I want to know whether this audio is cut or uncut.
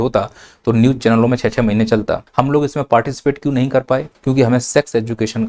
cut